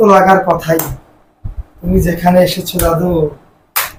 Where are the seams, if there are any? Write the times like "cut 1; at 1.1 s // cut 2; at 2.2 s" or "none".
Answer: none